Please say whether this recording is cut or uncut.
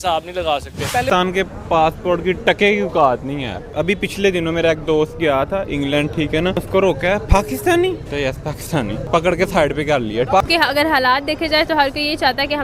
cut